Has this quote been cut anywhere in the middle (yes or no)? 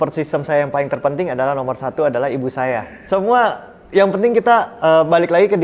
yes